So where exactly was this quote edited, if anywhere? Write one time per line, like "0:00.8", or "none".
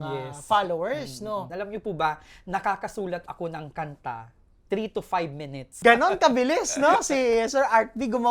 0:01.5
0:05.8